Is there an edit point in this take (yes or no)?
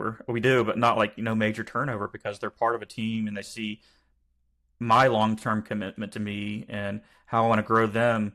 no